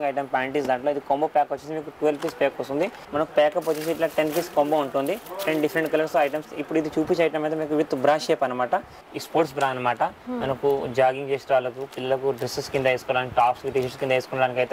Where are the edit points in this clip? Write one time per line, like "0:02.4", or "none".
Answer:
0:03.0
0:09.0

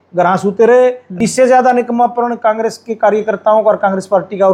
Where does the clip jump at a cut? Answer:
0:01.1

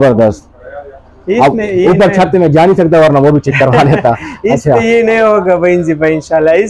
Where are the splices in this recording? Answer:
none

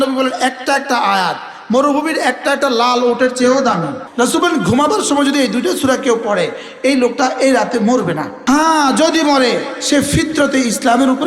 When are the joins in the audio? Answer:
0:04.0
0:08.3

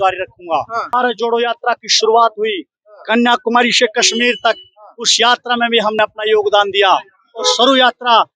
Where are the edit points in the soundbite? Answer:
0:00.9

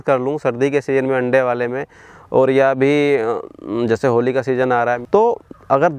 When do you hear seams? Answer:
0:05.0

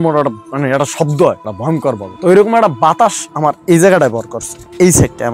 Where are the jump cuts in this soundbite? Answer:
none

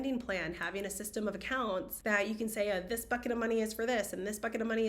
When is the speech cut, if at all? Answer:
0:01.9

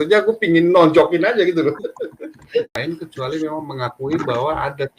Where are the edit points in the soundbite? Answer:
0:02.7

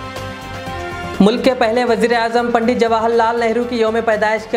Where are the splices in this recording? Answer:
0:01.1

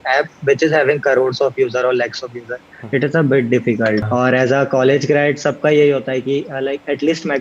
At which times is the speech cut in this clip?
0:04.1

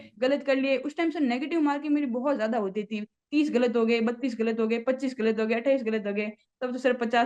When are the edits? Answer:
none

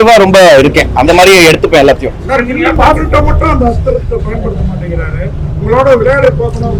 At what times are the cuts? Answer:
none

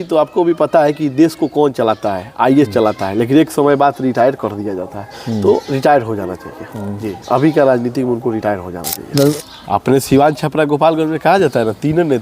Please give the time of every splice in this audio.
0:09.3

